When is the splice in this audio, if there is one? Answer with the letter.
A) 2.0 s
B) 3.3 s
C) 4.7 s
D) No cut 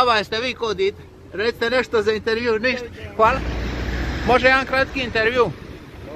B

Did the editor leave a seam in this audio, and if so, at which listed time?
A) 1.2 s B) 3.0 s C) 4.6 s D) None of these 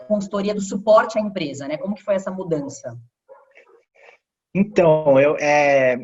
D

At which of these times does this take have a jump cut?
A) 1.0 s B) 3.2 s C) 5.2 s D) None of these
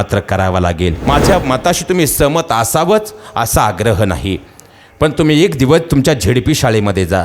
A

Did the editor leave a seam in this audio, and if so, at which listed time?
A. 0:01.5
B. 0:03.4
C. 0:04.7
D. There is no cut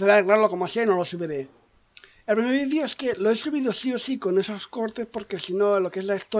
B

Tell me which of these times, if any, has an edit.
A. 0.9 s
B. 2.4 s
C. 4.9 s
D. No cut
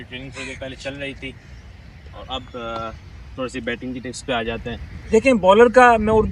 C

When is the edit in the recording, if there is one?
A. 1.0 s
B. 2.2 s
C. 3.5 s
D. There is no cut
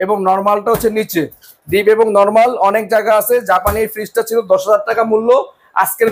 D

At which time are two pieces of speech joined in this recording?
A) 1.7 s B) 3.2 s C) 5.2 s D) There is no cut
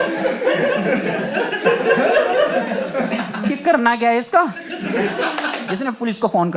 C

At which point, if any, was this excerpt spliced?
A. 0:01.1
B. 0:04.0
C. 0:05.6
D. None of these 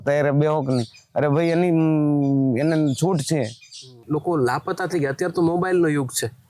B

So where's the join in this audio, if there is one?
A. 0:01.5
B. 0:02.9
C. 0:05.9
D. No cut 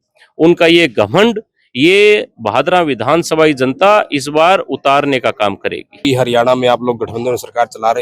C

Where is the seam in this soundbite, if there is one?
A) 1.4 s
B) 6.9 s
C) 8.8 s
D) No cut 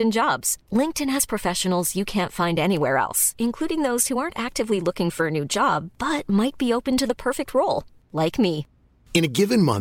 D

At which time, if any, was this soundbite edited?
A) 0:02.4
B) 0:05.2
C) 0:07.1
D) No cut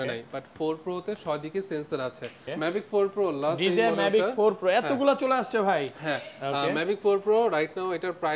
A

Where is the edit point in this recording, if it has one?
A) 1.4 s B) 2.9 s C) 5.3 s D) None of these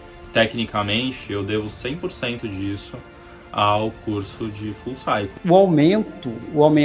C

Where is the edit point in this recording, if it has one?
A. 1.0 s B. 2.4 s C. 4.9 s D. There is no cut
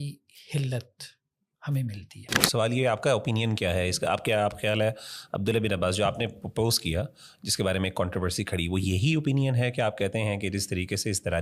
B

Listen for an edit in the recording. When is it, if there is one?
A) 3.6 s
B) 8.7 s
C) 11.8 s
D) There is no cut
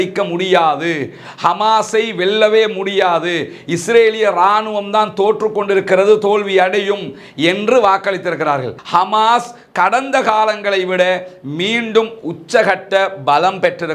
B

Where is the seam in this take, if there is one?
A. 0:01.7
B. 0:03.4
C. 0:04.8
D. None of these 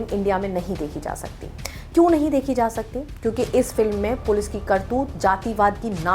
D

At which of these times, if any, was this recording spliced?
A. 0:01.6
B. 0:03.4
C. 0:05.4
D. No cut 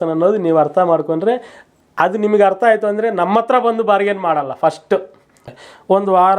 C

